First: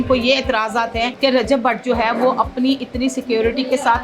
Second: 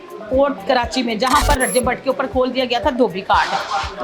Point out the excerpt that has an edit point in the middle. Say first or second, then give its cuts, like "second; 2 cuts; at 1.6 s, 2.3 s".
first; 1 cut; at 1.1 s